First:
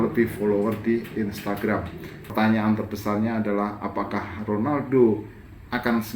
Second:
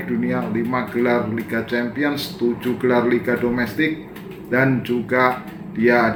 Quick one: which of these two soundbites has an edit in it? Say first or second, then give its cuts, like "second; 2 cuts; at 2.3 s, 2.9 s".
first; 1 cut; at 2.3 s